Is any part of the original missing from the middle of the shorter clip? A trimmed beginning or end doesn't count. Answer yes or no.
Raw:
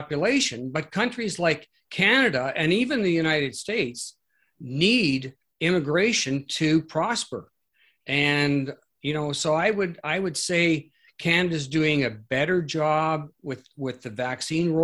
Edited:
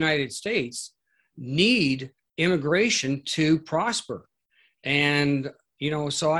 no